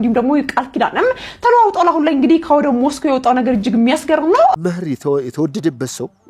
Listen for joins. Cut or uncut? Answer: cut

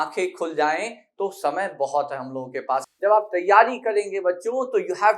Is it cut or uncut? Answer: cut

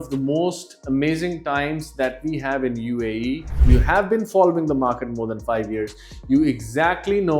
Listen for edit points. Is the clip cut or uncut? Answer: cut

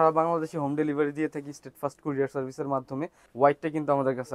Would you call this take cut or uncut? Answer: cut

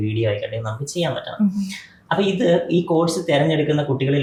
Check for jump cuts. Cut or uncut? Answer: uncut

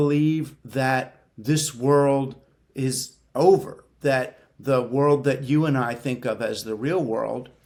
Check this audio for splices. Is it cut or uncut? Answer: uncut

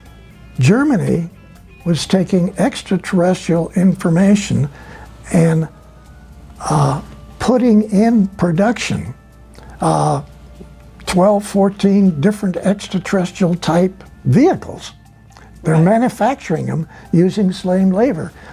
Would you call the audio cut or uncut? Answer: uncut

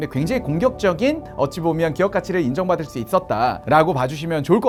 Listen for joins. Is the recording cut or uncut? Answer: uncut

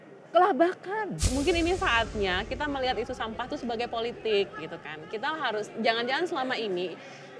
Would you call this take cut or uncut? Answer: cut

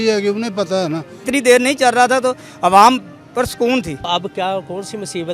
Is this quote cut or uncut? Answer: cut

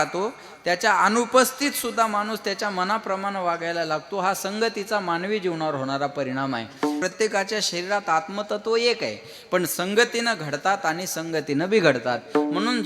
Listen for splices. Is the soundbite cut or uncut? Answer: cut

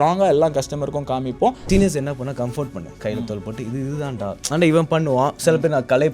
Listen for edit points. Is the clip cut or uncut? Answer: cut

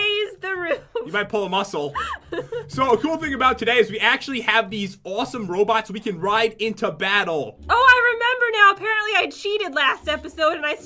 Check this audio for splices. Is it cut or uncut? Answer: cut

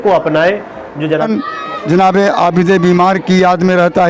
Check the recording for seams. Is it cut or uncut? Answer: cut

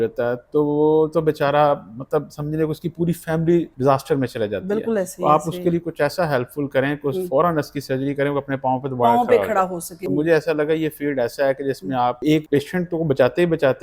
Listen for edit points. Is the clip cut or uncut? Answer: cut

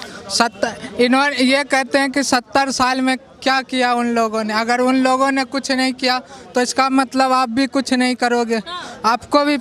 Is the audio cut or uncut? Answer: uncut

